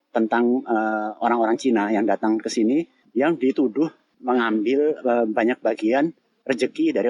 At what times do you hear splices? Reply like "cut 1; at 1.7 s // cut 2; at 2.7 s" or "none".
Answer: cut 1; at 3.0 s // cut 2; at 4.1 s